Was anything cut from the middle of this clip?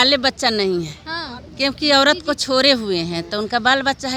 no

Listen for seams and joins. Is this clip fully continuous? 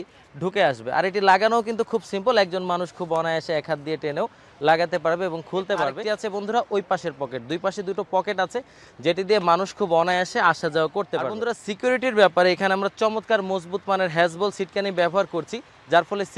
no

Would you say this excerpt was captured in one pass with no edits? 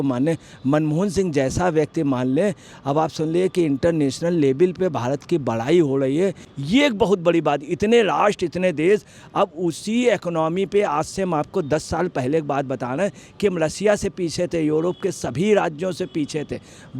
no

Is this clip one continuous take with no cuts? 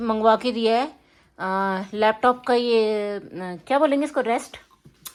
yes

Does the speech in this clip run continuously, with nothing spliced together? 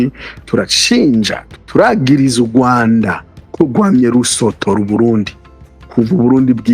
no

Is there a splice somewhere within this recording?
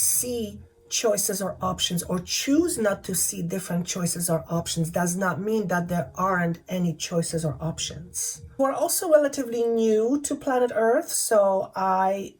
yes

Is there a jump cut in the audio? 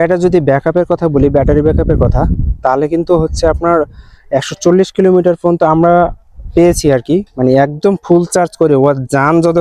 no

